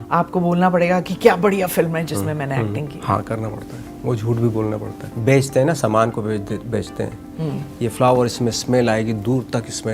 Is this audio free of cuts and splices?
no; 2 cuts; at 3.0 s, 5.0 s

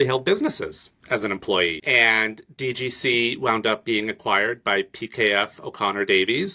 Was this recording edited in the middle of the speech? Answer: yes; 1 cut; at 1.8 s

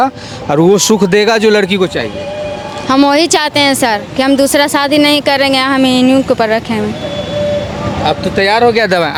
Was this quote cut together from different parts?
no; 0 cuts

